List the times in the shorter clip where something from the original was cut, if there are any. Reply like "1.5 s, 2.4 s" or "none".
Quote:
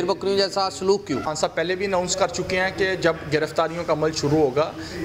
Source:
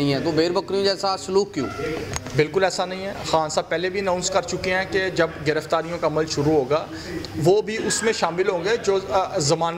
1.3 s